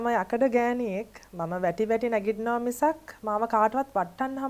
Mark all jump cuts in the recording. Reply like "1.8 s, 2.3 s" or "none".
none